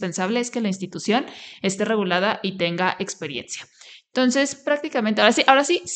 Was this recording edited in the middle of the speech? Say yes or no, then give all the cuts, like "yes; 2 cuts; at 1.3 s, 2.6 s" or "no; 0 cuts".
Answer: no; 0 cuts